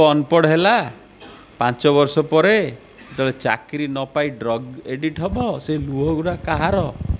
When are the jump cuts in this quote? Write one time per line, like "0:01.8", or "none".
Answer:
none